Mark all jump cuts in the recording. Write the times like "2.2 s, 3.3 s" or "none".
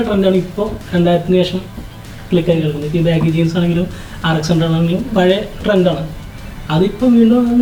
none